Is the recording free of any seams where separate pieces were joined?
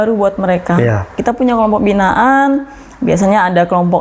no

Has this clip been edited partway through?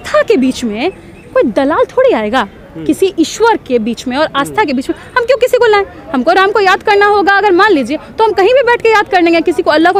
no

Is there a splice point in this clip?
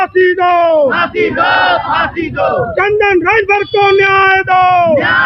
no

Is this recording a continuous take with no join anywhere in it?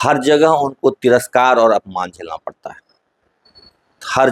yes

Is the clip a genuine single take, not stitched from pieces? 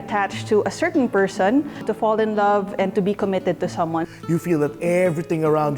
no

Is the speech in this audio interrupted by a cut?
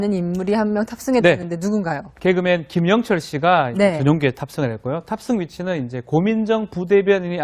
yes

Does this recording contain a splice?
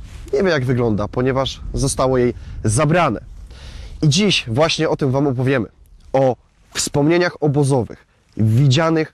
no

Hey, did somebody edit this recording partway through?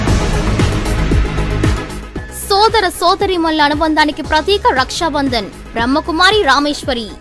no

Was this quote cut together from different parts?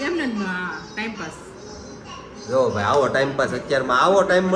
no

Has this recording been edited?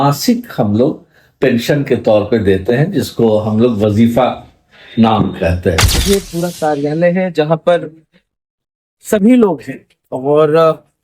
yes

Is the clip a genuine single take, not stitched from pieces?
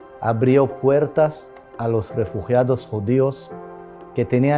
yes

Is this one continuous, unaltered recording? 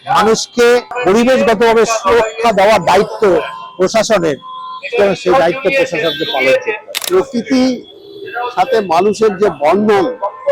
no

